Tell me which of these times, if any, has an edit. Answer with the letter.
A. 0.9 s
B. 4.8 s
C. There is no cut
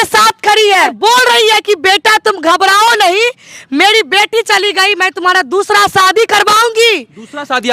A